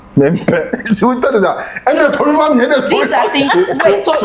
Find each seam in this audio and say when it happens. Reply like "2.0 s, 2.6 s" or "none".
none